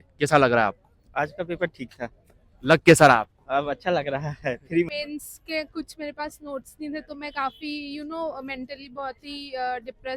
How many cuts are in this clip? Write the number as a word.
one